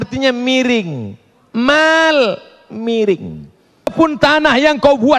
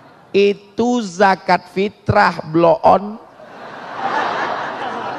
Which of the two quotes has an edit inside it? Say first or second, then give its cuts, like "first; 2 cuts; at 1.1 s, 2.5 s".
first; 1 cut; at 3.9 s